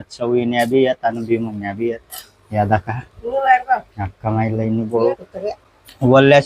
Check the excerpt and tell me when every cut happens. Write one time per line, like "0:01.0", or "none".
0:05.3